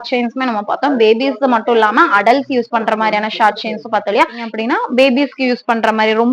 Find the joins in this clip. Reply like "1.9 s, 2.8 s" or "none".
4.4 s